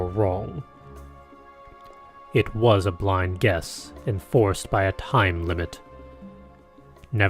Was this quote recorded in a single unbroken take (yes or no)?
no